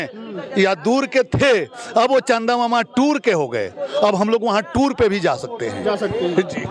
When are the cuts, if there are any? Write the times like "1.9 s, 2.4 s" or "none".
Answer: none